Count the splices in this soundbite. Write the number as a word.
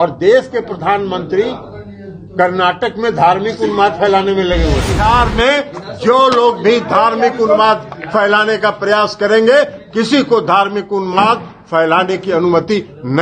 one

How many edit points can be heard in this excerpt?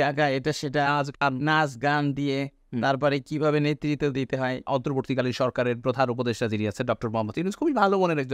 one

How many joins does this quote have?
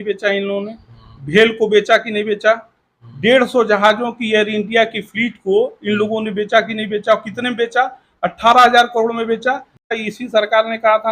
one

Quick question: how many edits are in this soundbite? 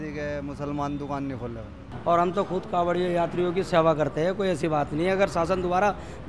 one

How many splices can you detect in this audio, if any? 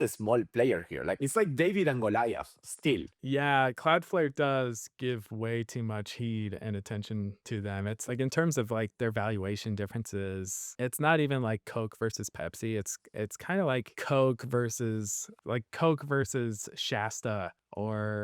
three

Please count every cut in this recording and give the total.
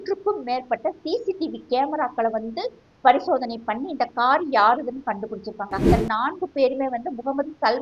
one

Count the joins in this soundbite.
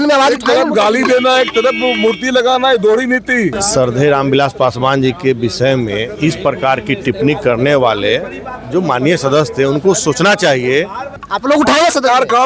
two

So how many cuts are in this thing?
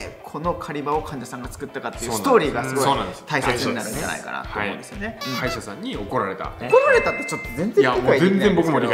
two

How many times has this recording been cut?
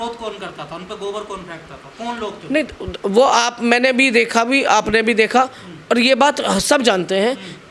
zero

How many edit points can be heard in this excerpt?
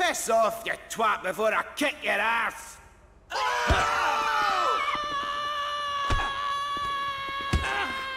zero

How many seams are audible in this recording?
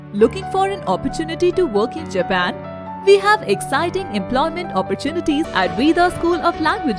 one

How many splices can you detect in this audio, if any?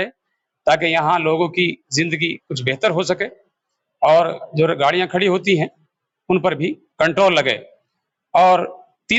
zero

